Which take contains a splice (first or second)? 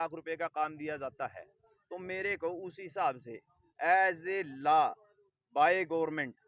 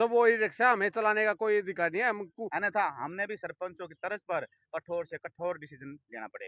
second